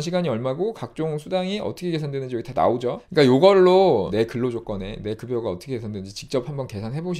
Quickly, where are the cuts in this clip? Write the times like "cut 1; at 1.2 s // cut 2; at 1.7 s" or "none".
cut 1; at 3.0 s // cut 2; at 4.1 s

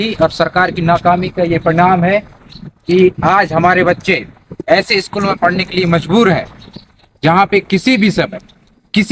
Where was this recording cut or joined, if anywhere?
none

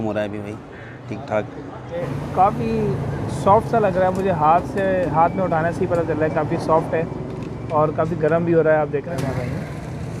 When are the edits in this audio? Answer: cut 1; at 2.0 s // cut 2; at 9.2 s

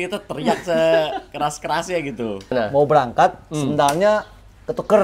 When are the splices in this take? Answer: cut 1; at 2.5 s

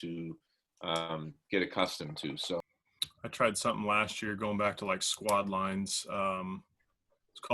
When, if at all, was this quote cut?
cut 1; at 2.6 s

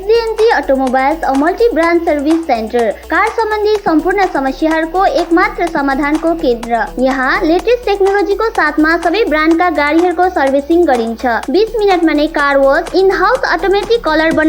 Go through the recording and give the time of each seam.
none

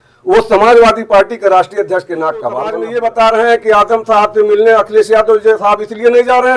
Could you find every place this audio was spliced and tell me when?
cut 1; at 2.8 s

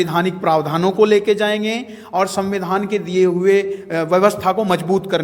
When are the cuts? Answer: none

